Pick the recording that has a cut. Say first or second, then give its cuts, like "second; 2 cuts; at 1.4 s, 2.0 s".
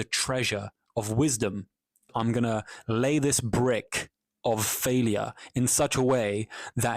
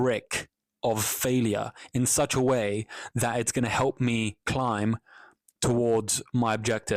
first; 1 cut; at 2.1 s